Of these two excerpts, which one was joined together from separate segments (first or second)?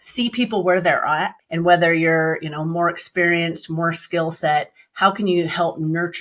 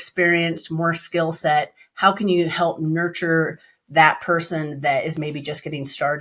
first